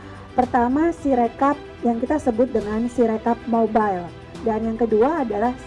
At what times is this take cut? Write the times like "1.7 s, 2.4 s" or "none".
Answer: 4.4 s